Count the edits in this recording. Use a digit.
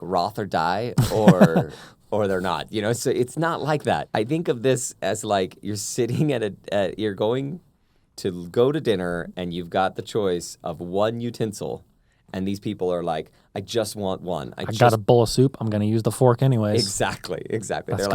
1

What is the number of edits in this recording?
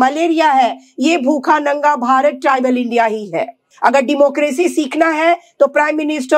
1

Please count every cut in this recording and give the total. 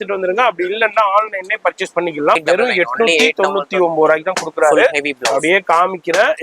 1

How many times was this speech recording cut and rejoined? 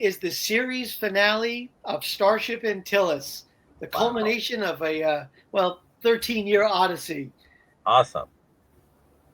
1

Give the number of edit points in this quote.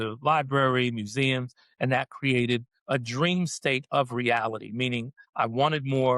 2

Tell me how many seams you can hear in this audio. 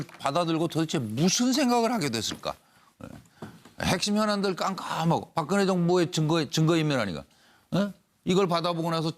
1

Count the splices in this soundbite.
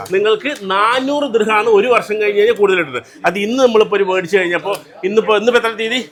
0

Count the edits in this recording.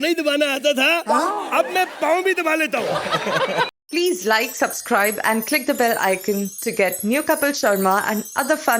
1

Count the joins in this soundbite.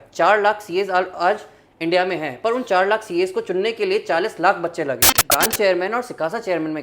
1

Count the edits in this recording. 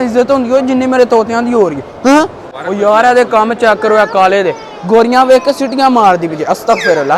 1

